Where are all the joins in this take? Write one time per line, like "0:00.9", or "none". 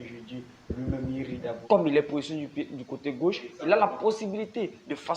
0:01.6